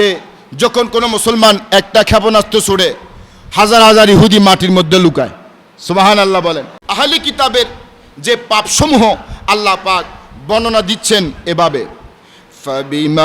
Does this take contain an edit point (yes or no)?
yes